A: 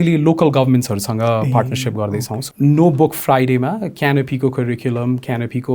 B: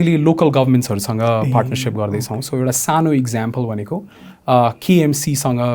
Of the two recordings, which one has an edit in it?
A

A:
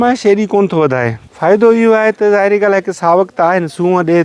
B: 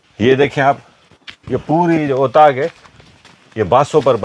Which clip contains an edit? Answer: A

